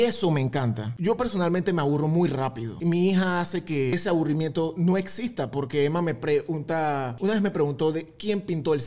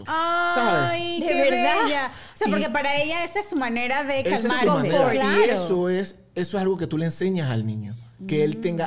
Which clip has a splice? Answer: first; 4 cuts; at 0.9 s, 2.7 s, 3.9 s, 7.1 s

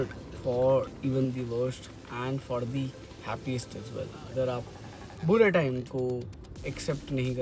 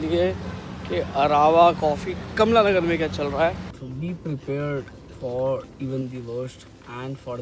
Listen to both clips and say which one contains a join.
second; 1 cut; at 3.7 s

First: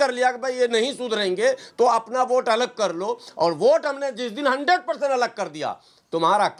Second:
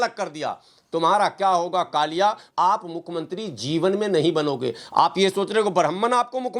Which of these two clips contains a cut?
second; 1 cut; at 2.4 s

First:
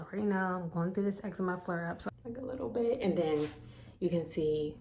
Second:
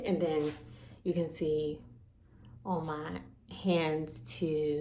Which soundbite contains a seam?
first; 1 cut; at 2.0 s

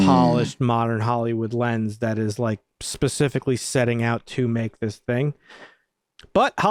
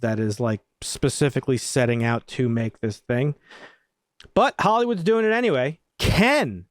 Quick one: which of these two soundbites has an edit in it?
second; 1 cut; at 5.8 s

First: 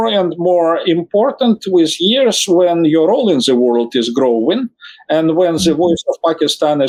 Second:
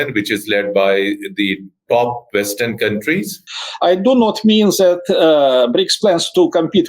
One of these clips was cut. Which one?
second; 1 cut; at 3.4 s

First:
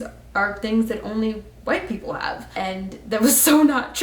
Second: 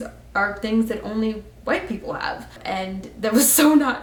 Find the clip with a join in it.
first; 1 cut; at 2.4 s

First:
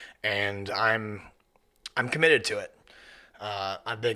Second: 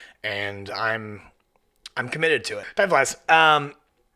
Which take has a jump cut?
second; 1 cut; at 2.7 s

